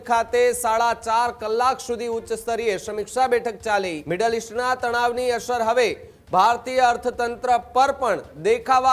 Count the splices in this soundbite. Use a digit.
1